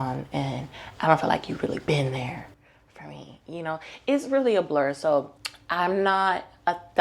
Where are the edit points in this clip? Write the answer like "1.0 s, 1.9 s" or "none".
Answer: none

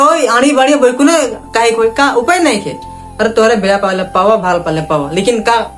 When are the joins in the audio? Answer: none

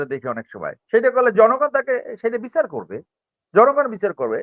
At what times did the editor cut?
none

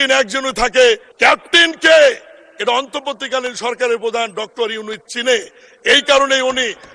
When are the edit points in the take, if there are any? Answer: 1.1 s

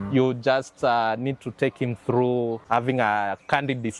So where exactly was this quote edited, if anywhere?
2.6 s

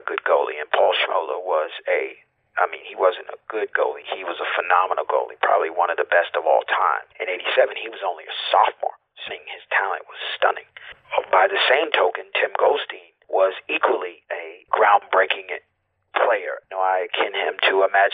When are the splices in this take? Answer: 7.1 s, 9.3 s, 11.0 s, 14.5 s, 16.6 s

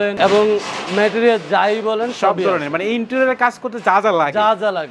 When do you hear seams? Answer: none

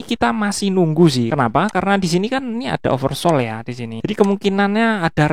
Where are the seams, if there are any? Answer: 1.3 s, 3.9 s

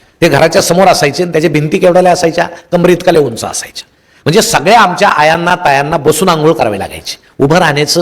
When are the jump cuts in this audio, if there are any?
none

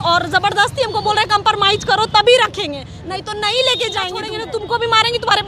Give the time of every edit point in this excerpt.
4.2 s

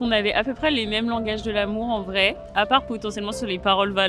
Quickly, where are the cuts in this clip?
2.5 s

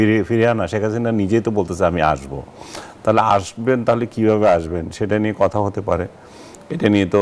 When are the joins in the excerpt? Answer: none

